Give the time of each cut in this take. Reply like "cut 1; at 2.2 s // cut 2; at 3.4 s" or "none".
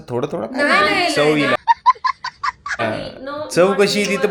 none